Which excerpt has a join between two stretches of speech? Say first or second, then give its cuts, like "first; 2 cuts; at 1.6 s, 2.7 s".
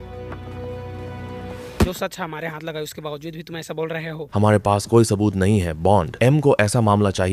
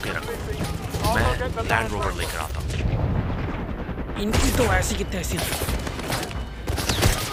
first; 1 cut; at 1.9 s